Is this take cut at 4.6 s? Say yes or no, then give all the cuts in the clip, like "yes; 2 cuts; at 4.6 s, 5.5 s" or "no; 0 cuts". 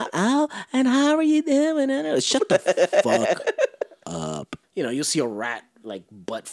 yes; 1 cut; at 4.6 s